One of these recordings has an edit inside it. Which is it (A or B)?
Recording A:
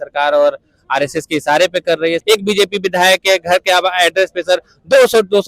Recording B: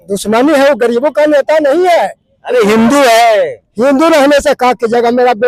A